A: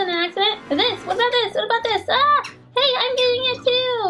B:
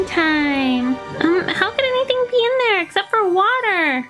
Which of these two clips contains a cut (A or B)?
B